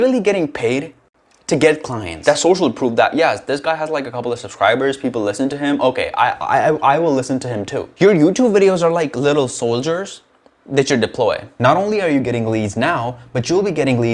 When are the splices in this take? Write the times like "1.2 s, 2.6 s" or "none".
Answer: 2.1 s, 7.8 s, 11.5 s